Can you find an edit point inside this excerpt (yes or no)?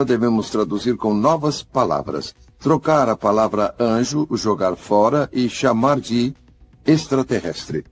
no